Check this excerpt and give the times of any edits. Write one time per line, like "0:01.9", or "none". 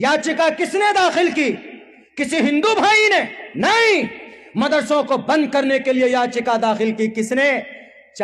none